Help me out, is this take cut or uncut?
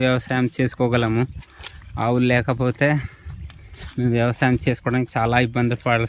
uncut